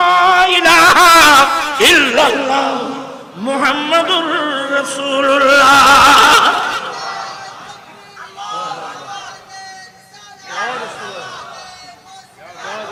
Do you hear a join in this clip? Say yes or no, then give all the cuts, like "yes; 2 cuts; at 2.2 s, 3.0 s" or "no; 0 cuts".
no; 0 cuts